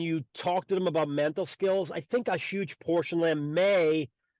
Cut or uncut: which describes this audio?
uncut